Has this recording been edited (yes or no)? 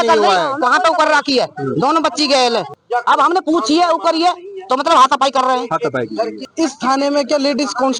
yes